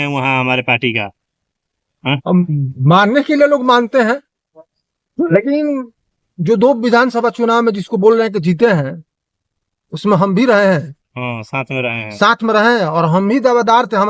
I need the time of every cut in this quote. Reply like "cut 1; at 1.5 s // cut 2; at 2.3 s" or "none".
none

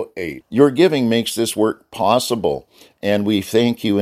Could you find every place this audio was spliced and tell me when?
none

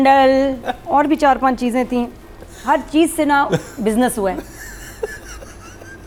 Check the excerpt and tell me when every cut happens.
none

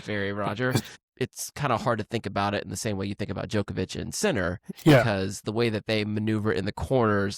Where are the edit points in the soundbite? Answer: cut 1; at 0.9 s // cut 2; at 4.7 s

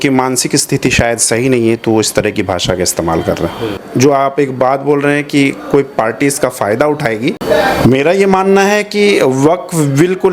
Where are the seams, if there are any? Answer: cut 1; at 3.6 s // cut 2; at 7.4 s

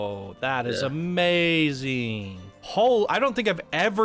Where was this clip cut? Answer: cut 1; at 2.5 s

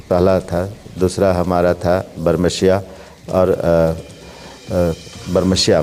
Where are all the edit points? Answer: none

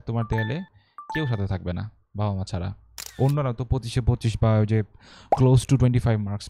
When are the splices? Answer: cut 1; at 3.2 s

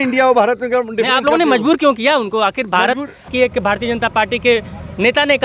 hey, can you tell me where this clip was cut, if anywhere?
cut 1; at 3.3 s

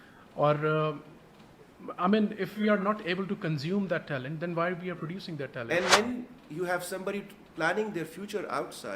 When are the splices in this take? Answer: cut 1; at 5.7 s

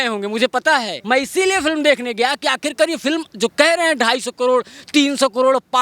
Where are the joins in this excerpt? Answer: cut 1; at 0.9 s

